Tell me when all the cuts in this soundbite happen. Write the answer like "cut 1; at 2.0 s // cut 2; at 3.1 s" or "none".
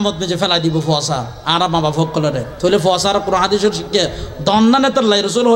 cut 1; at 2.5 s